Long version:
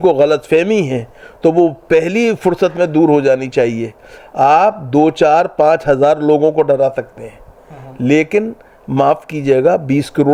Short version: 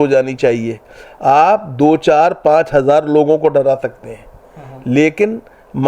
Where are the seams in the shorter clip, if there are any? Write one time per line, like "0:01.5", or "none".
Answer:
none